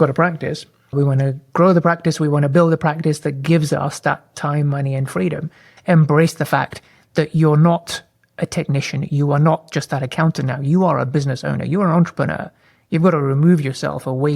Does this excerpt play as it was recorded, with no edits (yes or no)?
no